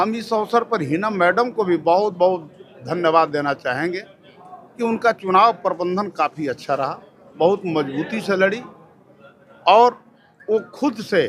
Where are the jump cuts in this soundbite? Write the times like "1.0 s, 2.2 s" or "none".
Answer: none